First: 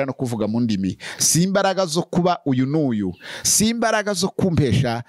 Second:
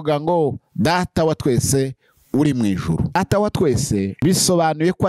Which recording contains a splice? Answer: second; 2 cuts; at 3.2 s, 4.1 s

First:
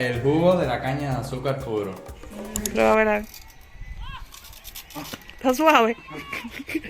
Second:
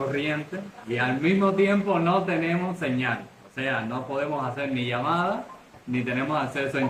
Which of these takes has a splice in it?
first; 1 cut; at 2.7 s

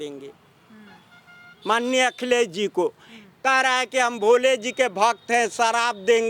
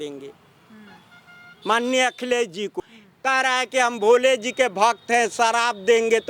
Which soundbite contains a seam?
second; 1 cut; at 2.8 s

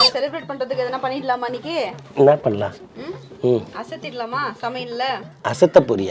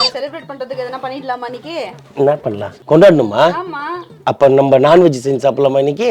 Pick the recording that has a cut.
second; 1 cut; at 2.7 s

